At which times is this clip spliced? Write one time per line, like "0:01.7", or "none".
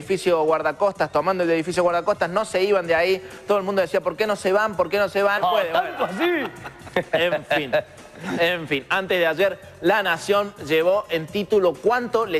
none

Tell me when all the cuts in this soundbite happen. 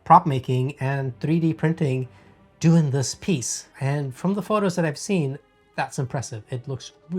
none

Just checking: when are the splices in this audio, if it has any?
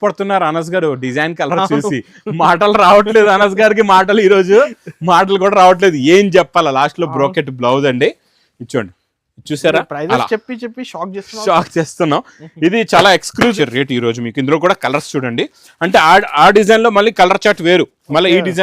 0:13.5

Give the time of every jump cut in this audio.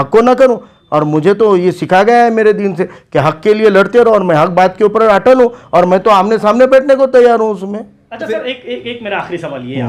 none

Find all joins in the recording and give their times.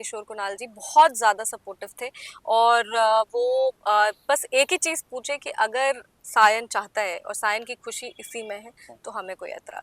none

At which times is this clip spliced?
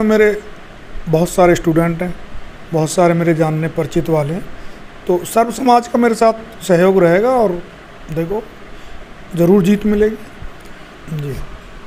none

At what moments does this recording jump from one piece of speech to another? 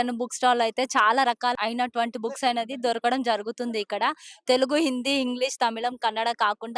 none

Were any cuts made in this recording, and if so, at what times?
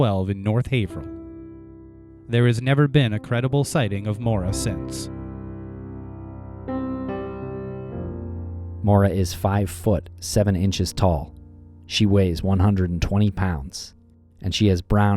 none

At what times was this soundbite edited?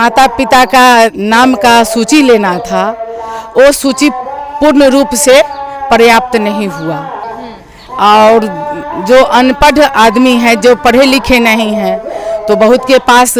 0:07.2

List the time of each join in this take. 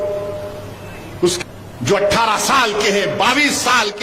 0:01.4

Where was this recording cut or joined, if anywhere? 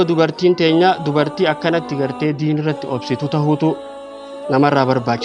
none

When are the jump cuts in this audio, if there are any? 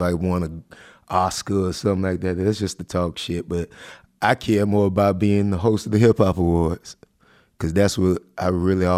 none

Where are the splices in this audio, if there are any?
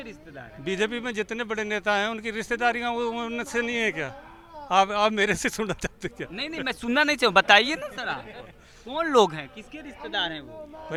none

